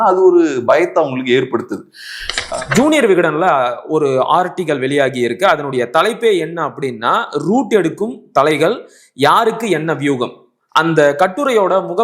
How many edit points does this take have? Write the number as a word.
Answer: one